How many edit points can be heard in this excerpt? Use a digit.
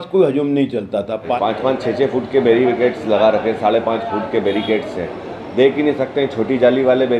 0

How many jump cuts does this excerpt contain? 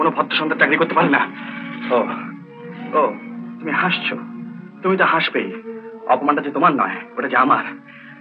0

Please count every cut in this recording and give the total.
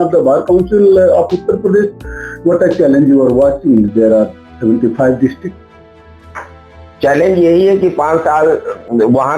0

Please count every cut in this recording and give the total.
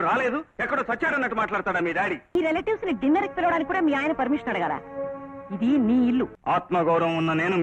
2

